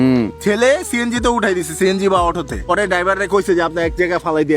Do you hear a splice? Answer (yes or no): yes